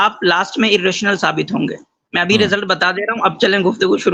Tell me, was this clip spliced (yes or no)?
no